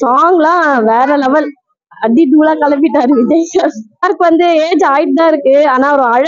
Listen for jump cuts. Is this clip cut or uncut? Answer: cut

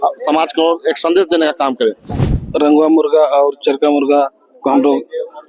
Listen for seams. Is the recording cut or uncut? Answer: cut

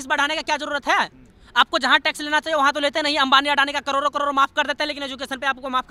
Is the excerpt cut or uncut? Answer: uncut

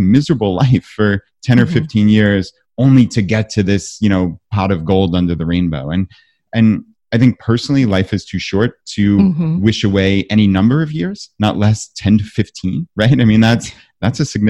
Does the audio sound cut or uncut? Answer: uncut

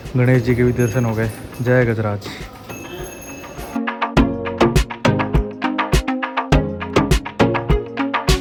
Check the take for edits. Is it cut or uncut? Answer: uncut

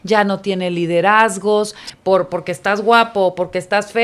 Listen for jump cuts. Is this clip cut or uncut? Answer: cut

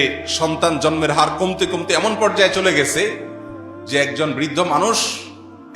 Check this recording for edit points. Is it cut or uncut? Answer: uncut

